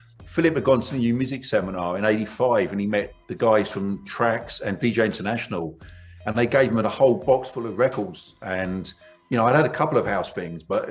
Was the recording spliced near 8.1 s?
no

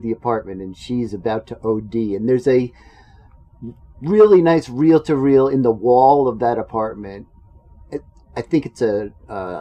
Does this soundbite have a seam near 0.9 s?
no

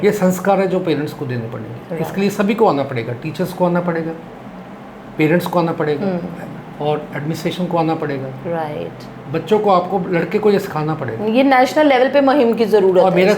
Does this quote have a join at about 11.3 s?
no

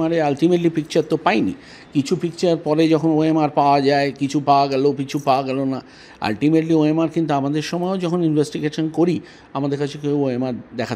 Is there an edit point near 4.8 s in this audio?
no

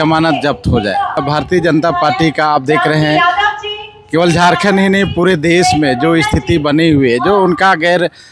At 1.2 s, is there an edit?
yes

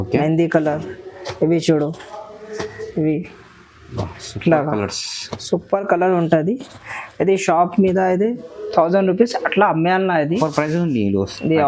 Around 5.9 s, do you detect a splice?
no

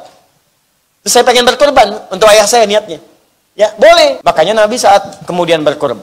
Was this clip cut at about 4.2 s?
yes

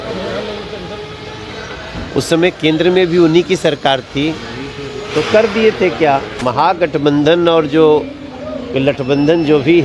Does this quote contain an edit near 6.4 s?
yes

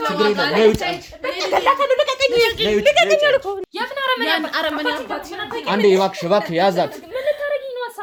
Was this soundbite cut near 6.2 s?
no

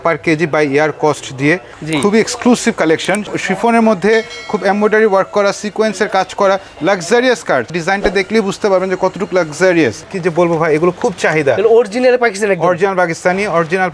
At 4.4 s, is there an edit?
no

